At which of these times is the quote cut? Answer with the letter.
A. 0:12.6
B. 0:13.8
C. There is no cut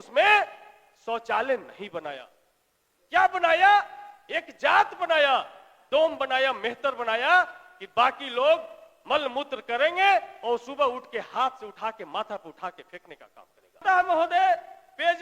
B